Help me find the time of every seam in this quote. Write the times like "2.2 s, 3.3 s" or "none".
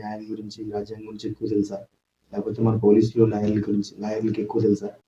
none